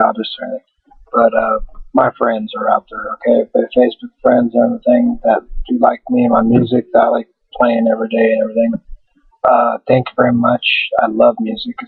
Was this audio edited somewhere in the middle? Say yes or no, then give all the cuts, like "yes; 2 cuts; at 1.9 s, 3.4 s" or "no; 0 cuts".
yes; 1 cut; at 3.7 s